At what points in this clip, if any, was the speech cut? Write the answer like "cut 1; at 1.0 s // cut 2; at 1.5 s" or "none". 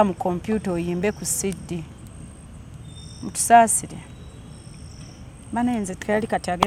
none